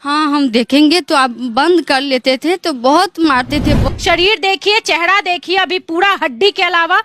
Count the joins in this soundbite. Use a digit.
1